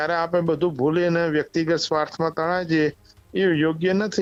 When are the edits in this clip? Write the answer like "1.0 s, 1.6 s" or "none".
none